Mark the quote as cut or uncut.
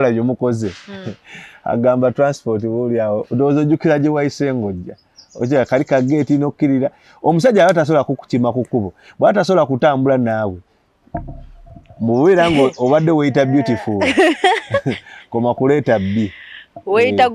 uncut